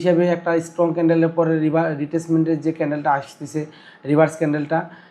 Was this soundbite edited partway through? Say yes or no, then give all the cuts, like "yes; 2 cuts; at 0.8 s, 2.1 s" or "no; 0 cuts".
no; 0 cuts